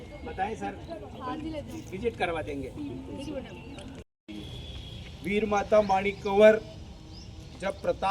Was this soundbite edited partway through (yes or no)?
yes